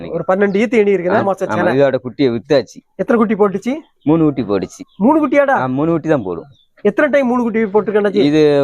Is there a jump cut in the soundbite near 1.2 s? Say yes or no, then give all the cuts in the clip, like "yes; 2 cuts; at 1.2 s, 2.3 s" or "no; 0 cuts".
yes; 1 cut; at 1.2 s